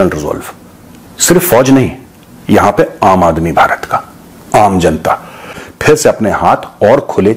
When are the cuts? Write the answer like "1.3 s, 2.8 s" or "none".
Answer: 5.6 s